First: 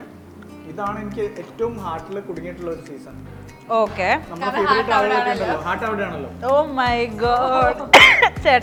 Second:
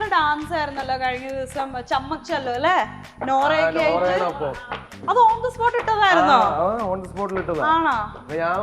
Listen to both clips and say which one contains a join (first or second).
second